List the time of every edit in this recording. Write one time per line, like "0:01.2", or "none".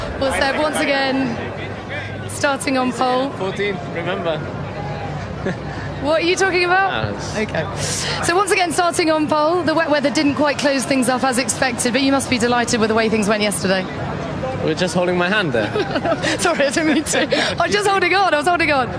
none